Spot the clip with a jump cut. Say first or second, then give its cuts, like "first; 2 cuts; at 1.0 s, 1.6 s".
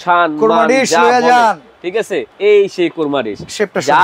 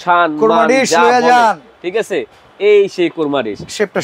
first; 1 cut; at 2.3 s